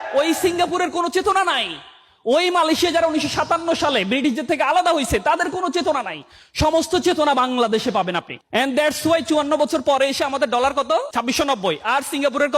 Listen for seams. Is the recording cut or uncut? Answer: cut